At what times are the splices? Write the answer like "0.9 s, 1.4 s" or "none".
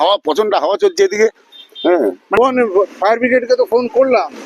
2.4 s